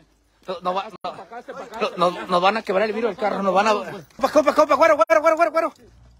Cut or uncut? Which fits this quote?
cut